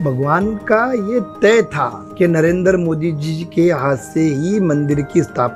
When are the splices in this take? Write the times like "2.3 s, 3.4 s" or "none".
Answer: 2.0 s

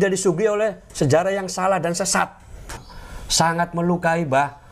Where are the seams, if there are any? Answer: 2.7 s

